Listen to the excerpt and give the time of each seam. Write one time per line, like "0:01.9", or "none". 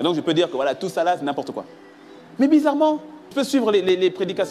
0:03.3